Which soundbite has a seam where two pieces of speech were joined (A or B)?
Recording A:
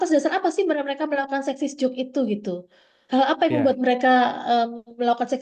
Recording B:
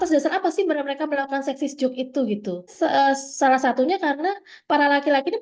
B